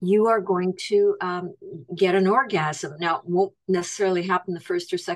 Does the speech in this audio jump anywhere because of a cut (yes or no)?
no